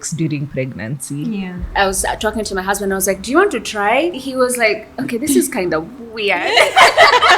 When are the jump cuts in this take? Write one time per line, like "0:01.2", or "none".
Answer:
0:01.7
0:04.1